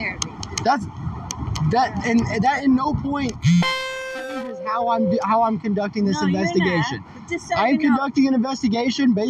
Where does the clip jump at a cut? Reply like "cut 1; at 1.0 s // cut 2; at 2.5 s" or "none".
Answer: none